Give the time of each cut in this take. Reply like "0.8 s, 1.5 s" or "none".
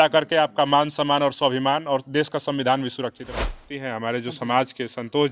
3.6 s